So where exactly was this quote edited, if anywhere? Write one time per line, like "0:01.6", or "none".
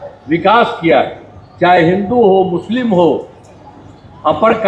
none